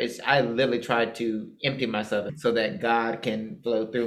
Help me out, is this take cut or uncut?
cut